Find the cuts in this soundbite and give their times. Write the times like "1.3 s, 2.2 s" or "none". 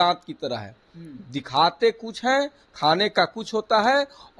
none